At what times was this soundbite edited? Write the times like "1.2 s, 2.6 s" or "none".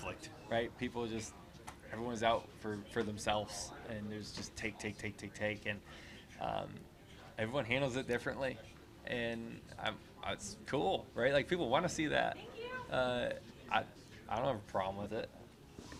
none